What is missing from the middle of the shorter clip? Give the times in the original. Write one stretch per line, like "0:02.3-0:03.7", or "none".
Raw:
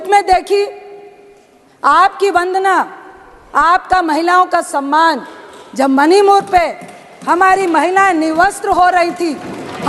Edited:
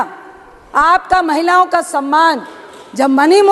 none